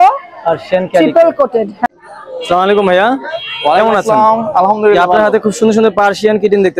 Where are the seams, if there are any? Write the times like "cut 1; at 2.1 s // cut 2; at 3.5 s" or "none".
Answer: cut 1; at 1.9 s